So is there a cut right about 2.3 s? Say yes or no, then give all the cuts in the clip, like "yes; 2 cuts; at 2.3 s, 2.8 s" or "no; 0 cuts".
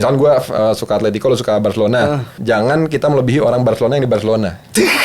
yes; 1 cut; at 2.3 s